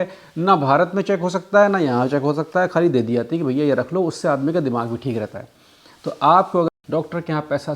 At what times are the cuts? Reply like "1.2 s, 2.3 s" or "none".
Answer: 6.8 s